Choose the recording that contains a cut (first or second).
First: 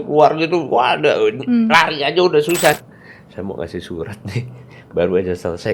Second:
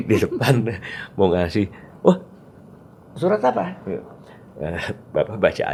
first